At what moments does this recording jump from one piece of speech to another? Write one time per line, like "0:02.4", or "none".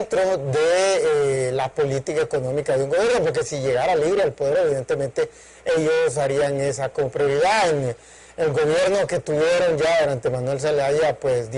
none